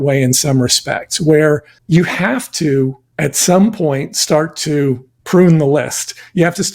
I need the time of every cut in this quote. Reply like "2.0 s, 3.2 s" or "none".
1.7 s, 3.0 s, 5.1 s